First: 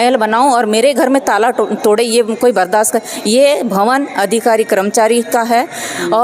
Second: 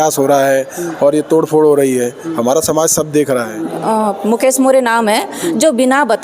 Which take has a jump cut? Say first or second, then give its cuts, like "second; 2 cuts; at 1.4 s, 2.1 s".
second; 1 cut; at 3.7 s